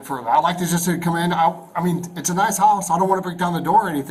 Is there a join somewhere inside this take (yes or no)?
no